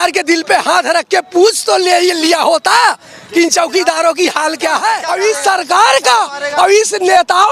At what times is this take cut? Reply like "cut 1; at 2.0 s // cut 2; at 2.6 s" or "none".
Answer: cut 1; at 5.0 s